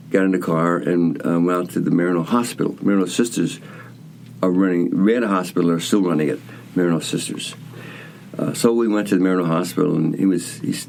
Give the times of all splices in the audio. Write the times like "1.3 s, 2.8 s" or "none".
none

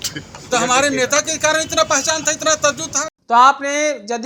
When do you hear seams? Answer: none

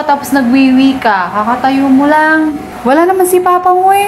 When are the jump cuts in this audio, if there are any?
2.7 s

